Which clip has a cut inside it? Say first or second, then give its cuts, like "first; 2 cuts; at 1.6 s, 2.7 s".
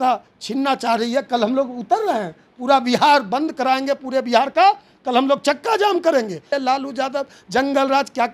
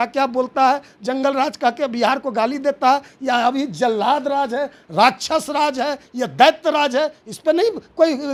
first; 1 cut; at 6.5 s